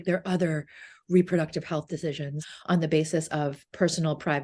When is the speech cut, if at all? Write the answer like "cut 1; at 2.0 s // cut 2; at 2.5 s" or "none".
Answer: cut 1; at 2.4 s